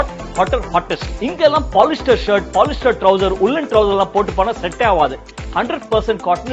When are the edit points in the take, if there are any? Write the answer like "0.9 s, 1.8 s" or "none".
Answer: 1.0 s